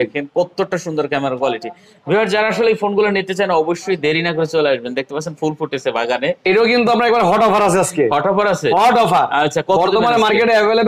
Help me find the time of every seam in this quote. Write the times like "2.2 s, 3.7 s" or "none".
none